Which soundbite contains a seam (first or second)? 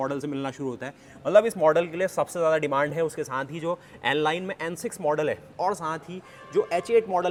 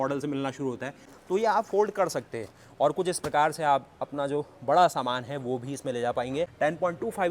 second